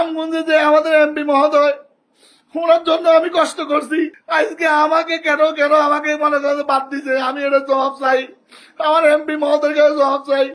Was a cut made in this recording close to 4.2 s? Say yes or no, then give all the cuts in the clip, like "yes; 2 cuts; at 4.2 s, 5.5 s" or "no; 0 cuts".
yes; 1 cut; at 4.2 s